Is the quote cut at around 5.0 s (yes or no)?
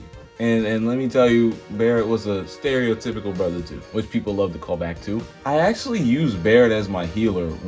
no